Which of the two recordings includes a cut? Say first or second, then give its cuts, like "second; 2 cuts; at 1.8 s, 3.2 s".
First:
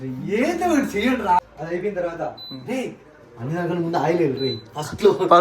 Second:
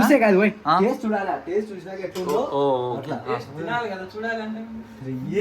first; 1 cut; at 1.4 s